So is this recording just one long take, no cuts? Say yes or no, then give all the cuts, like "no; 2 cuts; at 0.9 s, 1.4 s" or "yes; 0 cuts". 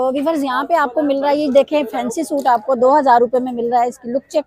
yes; 0 cuts